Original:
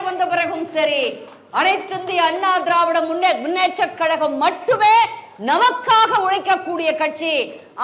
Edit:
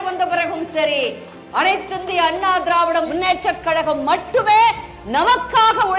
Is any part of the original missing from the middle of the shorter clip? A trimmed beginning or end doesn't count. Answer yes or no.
yes